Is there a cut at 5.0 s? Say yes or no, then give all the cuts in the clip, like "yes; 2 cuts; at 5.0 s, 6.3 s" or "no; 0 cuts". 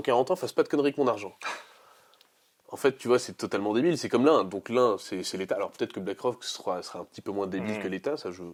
no; 0 cuts